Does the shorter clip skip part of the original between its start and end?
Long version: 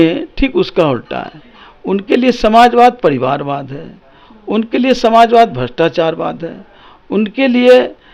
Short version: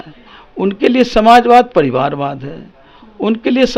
no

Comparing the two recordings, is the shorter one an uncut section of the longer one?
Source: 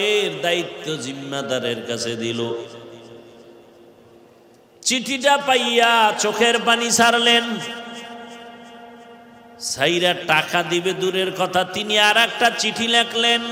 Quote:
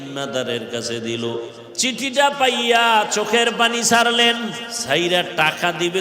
no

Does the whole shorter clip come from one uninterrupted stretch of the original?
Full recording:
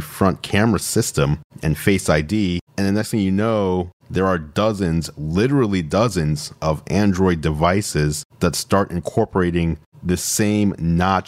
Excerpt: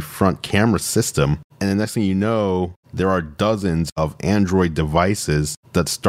no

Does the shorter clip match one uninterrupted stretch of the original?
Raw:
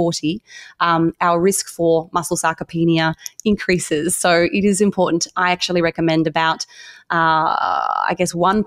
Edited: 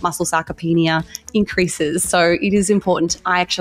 yes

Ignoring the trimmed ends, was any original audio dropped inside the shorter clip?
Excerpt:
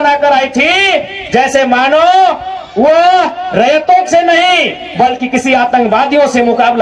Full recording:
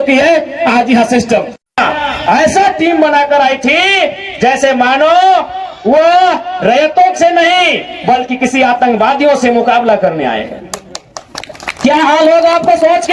no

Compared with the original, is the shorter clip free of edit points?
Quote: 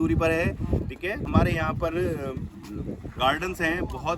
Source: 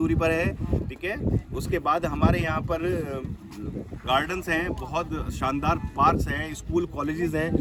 no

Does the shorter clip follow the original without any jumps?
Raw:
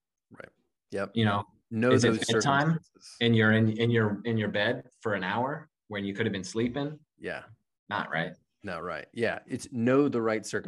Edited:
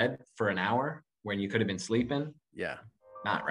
yes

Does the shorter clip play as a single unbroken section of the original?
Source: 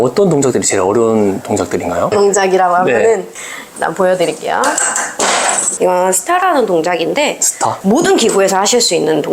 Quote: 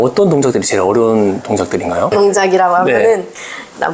yes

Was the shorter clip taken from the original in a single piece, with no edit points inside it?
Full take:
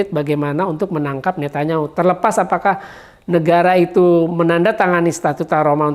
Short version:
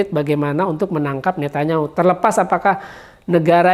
yes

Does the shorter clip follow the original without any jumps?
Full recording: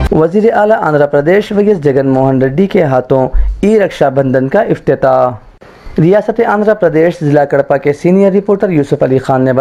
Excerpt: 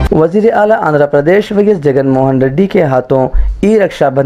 yes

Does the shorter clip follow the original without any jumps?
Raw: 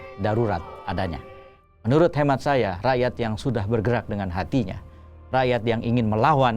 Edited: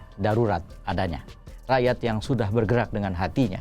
no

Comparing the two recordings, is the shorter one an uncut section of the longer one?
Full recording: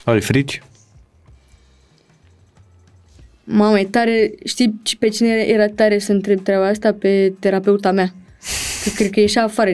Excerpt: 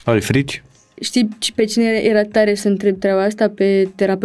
no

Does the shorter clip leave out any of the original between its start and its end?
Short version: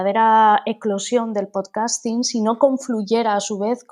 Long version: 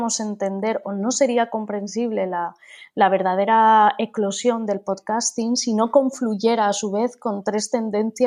no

